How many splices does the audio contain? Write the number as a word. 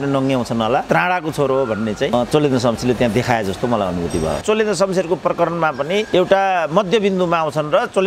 two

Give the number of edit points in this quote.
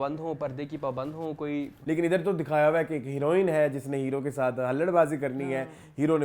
one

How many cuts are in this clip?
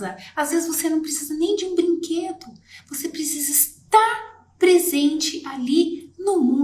zero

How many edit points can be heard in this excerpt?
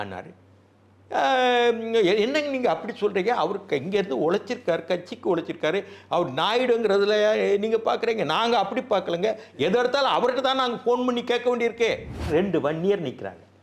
one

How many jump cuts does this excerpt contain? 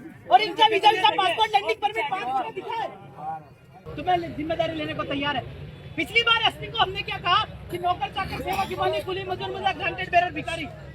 one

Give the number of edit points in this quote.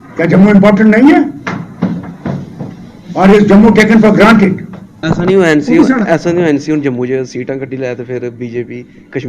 one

